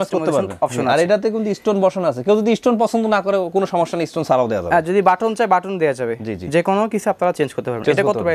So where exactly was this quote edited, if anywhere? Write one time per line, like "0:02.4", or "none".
none